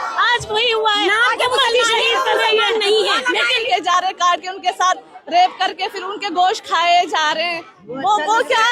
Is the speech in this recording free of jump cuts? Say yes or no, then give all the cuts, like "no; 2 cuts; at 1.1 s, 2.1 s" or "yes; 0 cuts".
no; 1 cut; at 3.7 s